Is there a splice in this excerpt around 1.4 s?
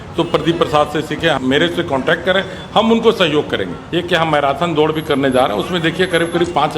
yes; 2 cuts; at 1.4 s, 3.8 s

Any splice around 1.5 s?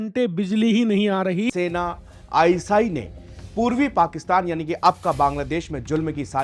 yes; 1 cut; at 1.5 s

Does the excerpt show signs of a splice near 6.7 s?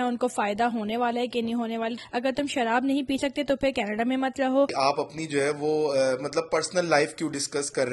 no; 2 cuts; at 2.0 s, 4.7 s

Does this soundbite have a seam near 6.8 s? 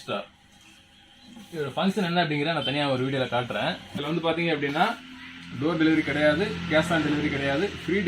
no; 1 cut; at 3.9 s

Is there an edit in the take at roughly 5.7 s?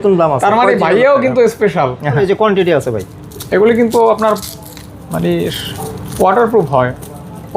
no; 1 cut; at 2.2 s

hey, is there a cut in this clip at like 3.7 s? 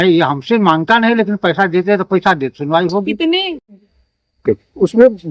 yes; 1 cut; at 3.7 s

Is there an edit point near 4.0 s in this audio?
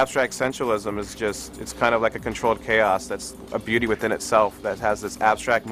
no; 0 cuts

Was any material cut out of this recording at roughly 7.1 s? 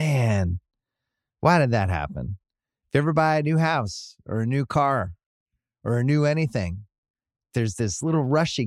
no; 0 cuts

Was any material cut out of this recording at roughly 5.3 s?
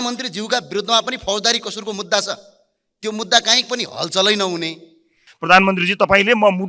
yes; 1 cut; at 5.3 s

